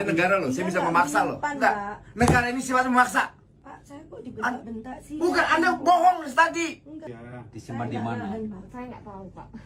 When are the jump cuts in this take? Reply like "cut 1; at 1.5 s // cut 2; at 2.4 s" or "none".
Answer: cut 1; at 7.0 s